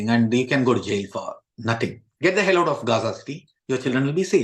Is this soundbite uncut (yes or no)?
no